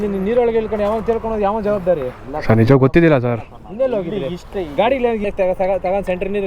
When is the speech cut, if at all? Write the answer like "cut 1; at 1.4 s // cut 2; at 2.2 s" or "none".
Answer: cut 1; at 5.3 s